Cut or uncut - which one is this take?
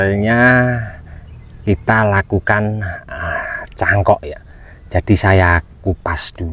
uncut